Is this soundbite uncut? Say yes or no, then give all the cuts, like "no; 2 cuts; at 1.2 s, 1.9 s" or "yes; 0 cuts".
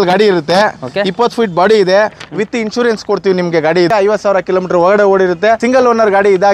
no; 2 cuts; at 3.9 s, 5.6 s